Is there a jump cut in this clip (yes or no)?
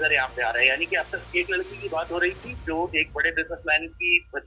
no